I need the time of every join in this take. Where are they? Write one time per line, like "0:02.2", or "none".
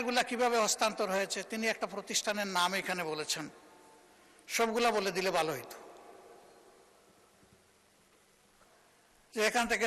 0:08.7